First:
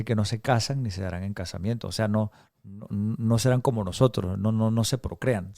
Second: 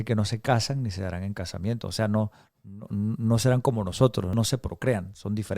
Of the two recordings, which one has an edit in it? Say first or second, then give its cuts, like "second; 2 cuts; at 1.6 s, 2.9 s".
second; 1 cut; at 4.3 s